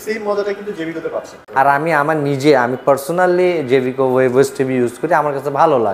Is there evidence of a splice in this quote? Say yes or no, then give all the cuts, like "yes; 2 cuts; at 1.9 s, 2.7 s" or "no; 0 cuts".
yes; 1 cut; at 1.4 s